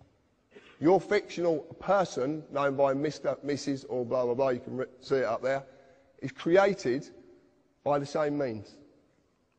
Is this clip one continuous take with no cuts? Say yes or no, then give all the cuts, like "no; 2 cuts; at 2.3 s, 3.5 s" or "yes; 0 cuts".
no; 1 cut; at 5.3 s